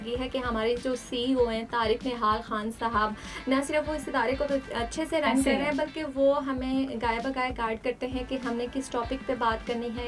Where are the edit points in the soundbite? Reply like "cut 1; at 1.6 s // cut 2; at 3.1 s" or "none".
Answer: none